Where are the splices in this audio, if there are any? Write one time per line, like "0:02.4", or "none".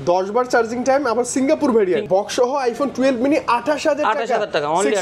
0:02.1